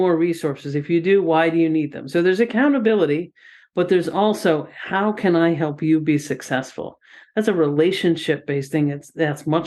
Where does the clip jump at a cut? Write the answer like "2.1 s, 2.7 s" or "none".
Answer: none